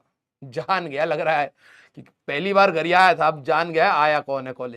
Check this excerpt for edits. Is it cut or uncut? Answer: uncut